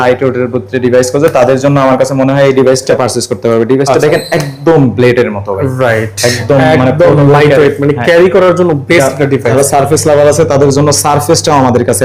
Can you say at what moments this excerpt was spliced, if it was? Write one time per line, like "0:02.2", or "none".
0:02.9
0:09.5